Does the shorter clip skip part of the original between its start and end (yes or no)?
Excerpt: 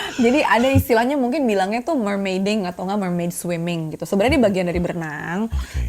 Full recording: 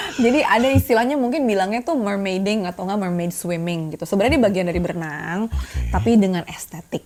no